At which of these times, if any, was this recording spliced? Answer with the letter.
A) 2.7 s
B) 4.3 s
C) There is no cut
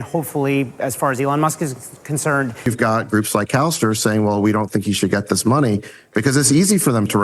A